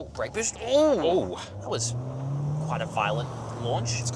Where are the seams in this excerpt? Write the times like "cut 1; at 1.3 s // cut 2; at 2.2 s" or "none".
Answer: none

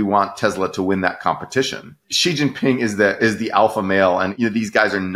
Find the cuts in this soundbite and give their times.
cut 1; at 1.9 s // cut 2; at 4.3 s

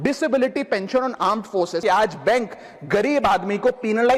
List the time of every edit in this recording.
cut 1; at 1.8 s

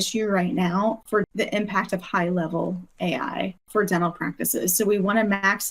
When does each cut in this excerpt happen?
cut 1; at 1.1 s // cut 2; at 3.7 s

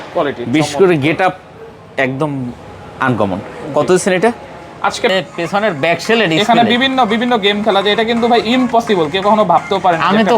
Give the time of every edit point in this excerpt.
cut 1; at 5.1 s

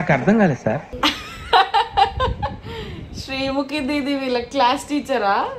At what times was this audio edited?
none

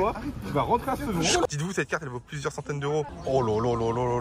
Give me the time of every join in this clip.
cut 1; at 1.4 s // cut 2; at 3.2 s

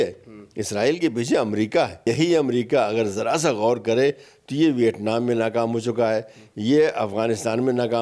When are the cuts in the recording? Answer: cut 1; at 2.0 s

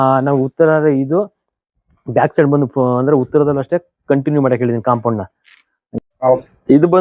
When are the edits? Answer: cut 1; at 6.0 s

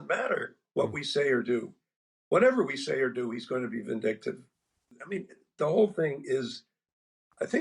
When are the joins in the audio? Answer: cut 1; at 4.8 s

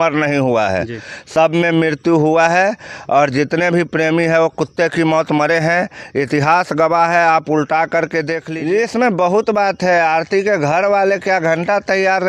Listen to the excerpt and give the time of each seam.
cut 1; at 8.4 s

